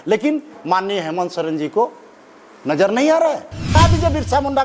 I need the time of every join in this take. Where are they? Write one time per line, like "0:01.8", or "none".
0:03.7